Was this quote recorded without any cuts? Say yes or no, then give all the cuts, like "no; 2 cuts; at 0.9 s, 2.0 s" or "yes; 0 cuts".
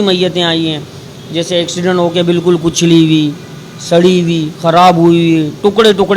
yes; 0 cuts